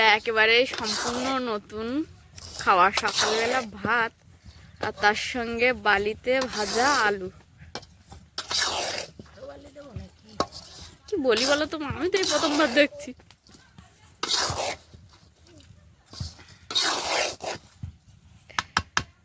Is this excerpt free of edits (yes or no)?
yes